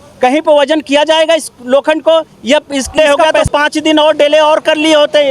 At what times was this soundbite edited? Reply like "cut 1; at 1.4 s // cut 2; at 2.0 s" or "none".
cut 1; at 2.9 s

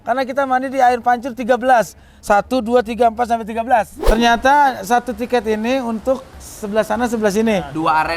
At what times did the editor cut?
cut 1; at 4.0 s

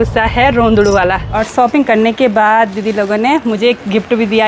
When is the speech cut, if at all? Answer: cut 1; at 1.3 s

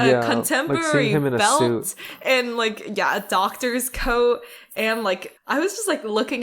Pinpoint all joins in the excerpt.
cut 1; at 5.3 s

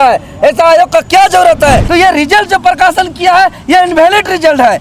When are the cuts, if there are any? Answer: cut 1; at 1.9 s

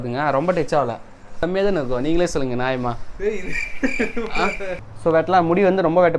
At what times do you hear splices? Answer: cut 1; at 1.4 s // cut 2; at 4.8 s

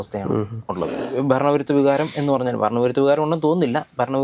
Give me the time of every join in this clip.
cut 1; at 0.9 s

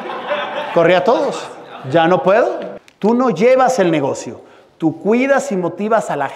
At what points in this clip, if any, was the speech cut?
cut 1; at 2.7 s

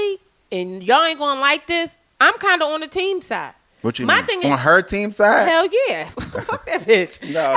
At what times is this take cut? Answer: cut 1; at 4.4 s

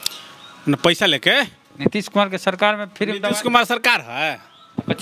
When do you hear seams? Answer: cut 1; at 1.6 s

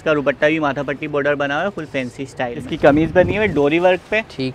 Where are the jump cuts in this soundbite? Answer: cut 1; at 2.6 s

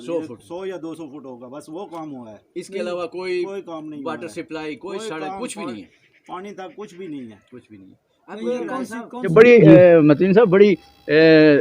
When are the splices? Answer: cut 1; at 9.3 s

